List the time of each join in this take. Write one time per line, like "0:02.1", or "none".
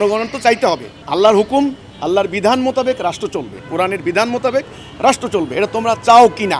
0:00.9